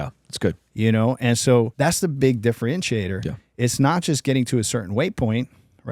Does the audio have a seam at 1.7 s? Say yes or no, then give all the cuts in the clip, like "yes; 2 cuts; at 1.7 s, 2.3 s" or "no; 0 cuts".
yes; 1 cut; at 1.7 s